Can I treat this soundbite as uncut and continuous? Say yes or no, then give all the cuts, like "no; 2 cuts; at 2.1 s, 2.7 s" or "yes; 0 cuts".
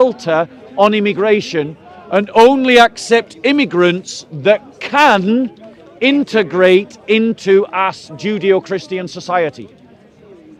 yes; 0 cuts